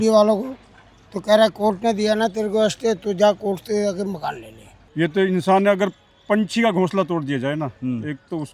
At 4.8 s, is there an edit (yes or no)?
yes